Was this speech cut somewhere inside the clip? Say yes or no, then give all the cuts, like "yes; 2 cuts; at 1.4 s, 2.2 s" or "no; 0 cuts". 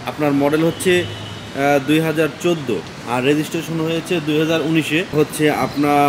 yes; 1 cut; at 5.1 s